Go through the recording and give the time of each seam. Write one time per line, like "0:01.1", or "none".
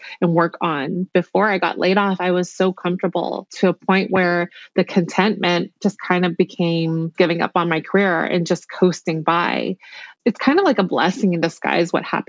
0:01.0
0:03.5
0:07.1
0:10.1